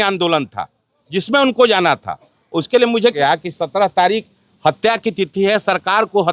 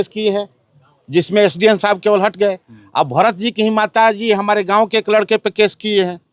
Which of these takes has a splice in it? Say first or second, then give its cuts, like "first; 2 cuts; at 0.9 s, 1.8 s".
first; 1 cut; at 3.1 s